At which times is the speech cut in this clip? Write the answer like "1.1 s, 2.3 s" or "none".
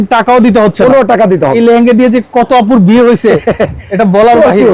1.6 s